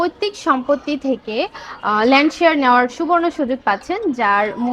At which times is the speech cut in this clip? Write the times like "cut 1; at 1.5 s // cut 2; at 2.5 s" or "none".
none